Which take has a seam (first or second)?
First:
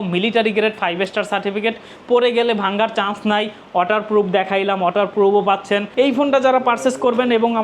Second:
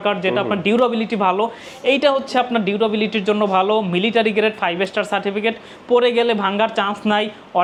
first